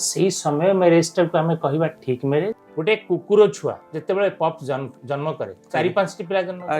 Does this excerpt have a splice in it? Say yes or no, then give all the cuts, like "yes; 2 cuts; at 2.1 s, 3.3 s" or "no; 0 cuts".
yes; 2 cuts; at 2.6 s, 3.9 s